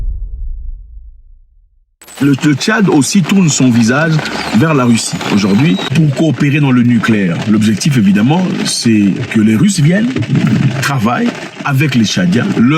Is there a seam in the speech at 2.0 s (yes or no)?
yes